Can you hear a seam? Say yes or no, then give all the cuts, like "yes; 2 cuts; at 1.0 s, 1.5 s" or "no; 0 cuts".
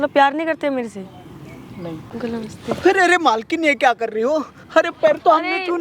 yes; 1 cut; at 2.1 s